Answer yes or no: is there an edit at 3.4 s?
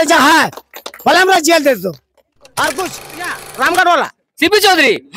yes